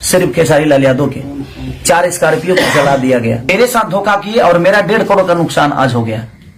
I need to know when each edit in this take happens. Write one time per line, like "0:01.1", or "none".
0:03.5